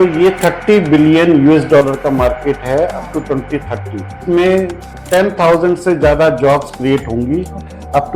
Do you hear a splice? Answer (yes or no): yes